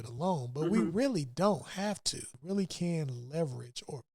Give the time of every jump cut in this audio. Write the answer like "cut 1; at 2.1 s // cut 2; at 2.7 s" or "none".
cut 1; at 2.3 s